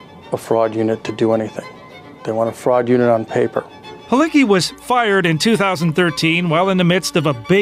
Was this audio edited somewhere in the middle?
no; 0 cuts

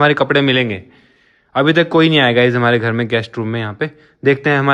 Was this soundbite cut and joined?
no; 0 cuts

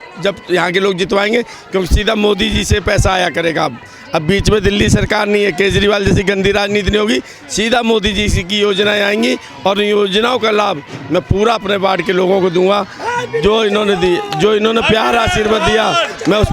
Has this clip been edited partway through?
no; 0 cuts

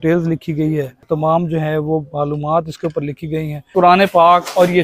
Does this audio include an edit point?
yes; 2 cuts; at 1.0 s, 3.7 s

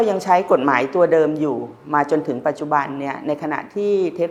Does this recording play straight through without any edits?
yes; 0 cuts

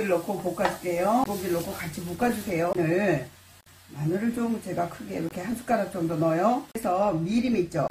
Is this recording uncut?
no; 3 cuts; at 1.2 s, 2.7 s, 6.8 s

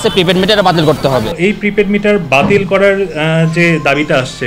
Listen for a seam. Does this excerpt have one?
yes; 1 cut; at 1.3 s

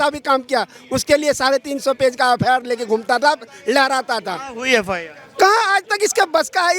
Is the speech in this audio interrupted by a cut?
no; 0 cuts

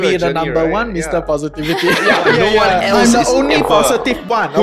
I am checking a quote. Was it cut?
yes; 1 cut; at 2.4 s

